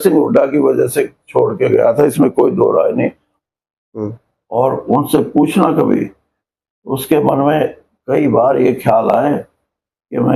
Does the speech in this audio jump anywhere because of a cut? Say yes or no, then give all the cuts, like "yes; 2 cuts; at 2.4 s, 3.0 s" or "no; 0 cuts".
yes; 1 cut; at 3.3 s